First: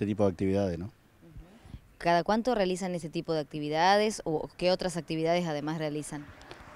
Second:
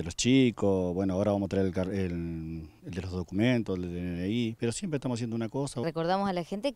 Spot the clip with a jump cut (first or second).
second